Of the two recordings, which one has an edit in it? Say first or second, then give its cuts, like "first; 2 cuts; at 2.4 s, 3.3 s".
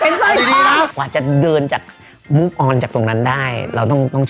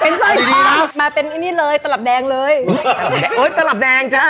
first; 1 cut; at 0.9 s